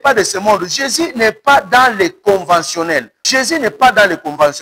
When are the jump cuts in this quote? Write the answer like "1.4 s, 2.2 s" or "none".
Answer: 3.2 s